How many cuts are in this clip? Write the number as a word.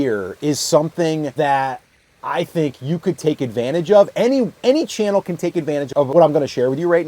two